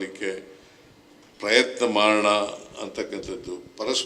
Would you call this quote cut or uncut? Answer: uncut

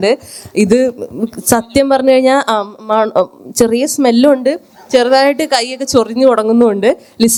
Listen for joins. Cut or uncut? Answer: uncut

